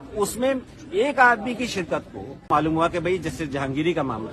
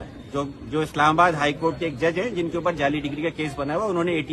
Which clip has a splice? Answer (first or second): first